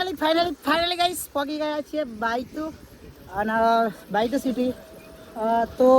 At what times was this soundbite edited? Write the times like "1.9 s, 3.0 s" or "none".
none